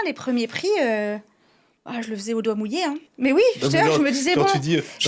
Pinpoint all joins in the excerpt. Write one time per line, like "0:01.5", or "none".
0:03.1